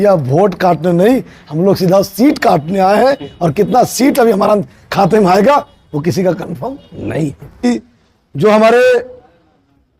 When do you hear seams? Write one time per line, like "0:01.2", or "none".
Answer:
0:07.6